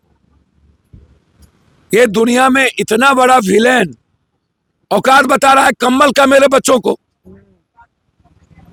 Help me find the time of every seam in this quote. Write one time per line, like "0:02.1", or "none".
none